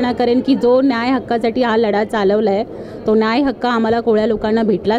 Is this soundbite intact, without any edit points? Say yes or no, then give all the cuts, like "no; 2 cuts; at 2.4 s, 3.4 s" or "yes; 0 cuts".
yes; 0 cuts